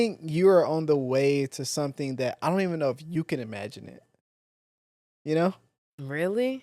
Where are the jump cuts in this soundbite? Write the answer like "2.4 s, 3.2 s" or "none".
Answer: none